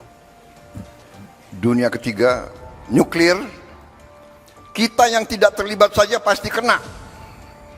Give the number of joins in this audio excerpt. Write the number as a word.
one